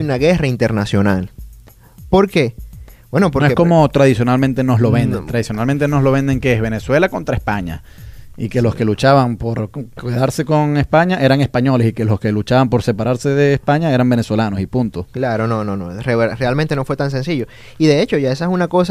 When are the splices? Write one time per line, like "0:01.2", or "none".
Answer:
0:15.5